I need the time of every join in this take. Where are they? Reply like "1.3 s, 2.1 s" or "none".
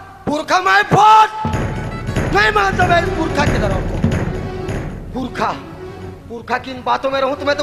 none

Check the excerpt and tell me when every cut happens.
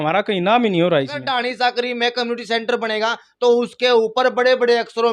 1.3 s

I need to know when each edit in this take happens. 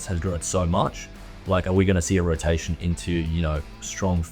none

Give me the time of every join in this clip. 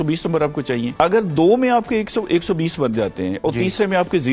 0.9 s

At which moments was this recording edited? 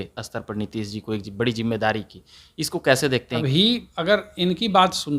3.5 s

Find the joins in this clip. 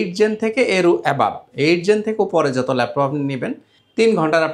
none

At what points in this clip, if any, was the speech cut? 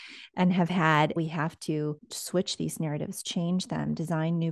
1.1 s

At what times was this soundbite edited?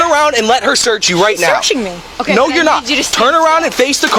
none

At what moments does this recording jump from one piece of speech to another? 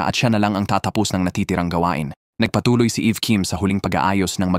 2.5 s

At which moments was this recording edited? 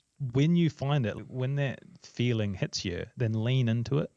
1.2 s

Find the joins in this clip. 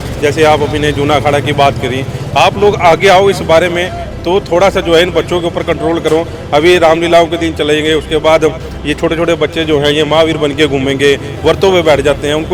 none

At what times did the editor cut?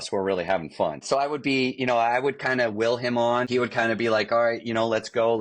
1.0 s, 3.5 s

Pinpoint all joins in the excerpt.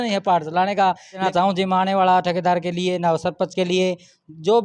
1.2 s

